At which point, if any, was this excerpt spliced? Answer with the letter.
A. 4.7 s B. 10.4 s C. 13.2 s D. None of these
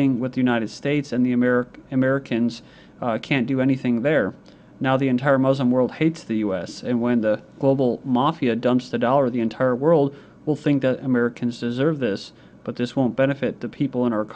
C